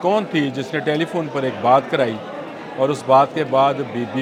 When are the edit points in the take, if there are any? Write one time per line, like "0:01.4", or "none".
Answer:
none